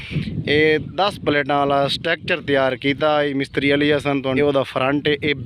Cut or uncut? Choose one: cut